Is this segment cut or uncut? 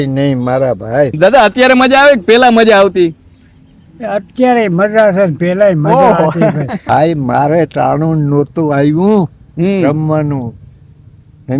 cut